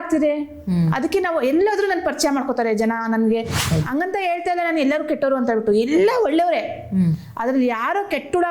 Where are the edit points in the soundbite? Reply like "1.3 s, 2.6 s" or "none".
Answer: 3.6 s